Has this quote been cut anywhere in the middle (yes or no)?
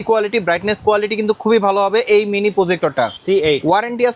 yes